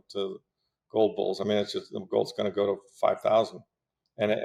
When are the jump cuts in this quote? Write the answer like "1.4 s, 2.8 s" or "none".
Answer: none